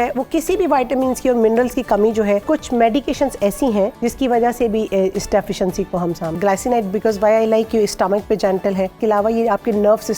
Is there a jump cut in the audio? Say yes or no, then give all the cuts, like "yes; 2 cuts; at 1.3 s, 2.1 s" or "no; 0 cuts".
yes; 4 cuts; at 2.4 s, 4.0 s, 6.4 s, 9.0 s